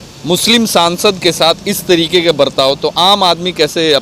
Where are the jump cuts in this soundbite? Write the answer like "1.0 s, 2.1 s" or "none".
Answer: none